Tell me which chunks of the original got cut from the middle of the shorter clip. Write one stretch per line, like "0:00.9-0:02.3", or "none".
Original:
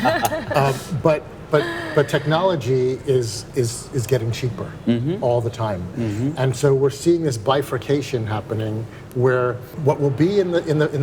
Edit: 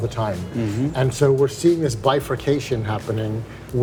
none